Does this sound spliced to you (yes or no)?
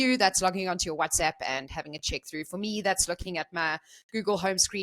no